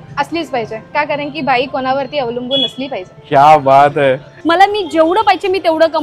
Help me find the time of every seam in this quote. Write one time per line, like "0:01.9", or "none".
0:00.9
0:04.3